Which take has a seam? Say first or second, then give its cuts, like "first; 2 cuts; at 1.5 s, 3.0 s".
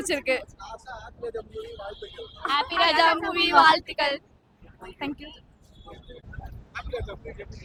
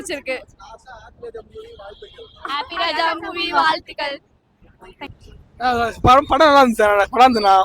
second; 1 cut; at 5.1 s